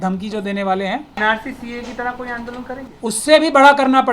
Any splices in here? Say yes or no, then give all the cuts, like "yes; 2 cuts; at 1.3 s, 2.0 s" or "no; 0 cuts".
yes; 1 cut; at 1.2 s